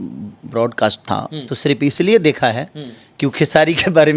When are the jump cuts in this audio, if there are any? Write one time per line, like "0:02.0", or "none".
0:01.5